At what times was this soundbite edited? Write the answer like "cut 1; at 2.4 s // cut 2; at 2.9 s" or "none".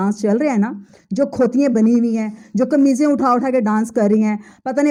none